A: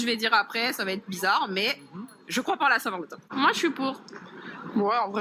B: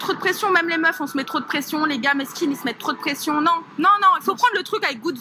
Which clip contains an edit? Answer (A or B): A